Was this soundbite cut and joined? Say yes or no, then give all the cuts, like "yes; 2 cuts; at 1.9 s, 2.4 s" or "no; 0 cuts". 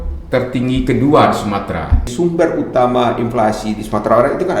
yes; 1 cut; at 2.1 s